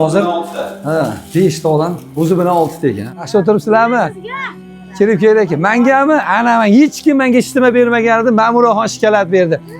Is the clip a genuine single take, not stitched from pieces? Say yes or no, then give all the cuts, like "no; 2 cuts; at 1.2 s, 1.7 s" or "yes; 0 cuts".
no; 1 cut; at 3.1 s